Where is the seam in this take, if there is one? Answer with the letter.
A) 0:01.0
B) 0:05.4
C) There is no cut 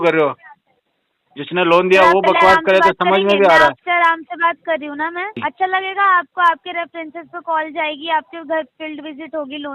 B